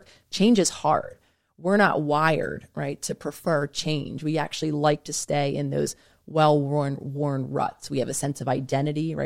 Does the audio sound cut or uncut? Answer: uncut